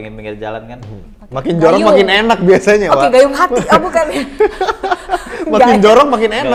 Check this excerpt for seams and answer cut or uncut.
uncut